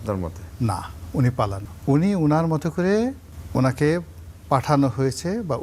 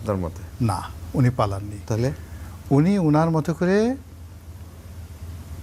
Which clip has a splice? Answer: first; 2 cuts; at 1.7 s, 3.3 s

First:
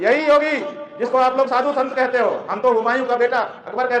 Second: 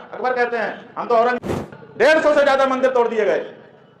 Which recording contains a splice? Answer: second; 1 cut; at 1.4 s

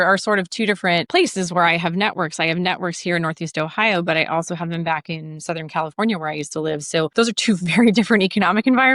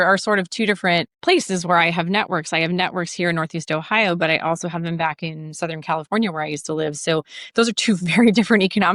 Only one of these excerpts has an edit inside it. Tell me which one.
first; 2 cuts; at 1.1 s, 7.1 s

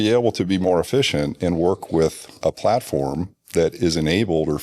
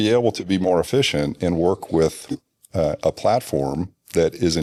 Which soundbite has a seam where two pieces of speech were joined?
first; 1 cut; at 2.4 s

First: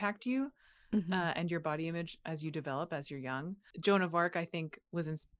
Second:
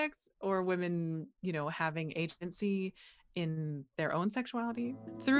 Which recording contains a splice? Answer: first; 1 cut; at 3.7 s

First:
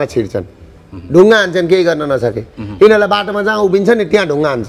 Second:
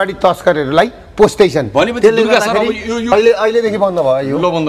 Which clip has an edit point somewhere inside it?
second; 1 cut; at 3.1 s

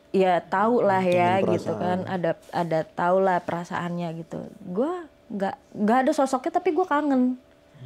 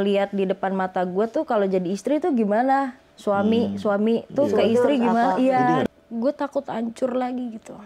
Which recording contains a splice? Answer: second; 1 cut; at 5.8 s

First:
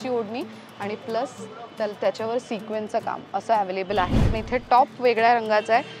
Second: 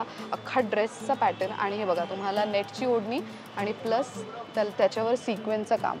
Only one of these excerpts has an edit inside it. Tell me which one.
first; 1 cut; at 4.3 s

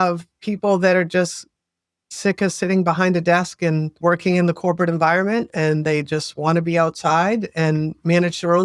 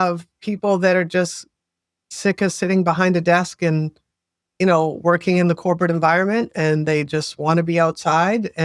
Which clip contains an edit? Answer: first; 1 cut; at 3.9 s

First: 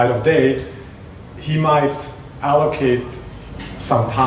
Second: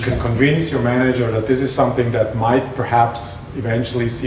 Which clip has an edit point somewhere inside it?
second; 1 cut; at 2.1 s

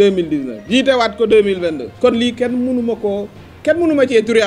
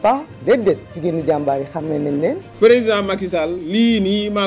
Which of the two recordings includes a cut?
second; 1 cut; at 2.4 s

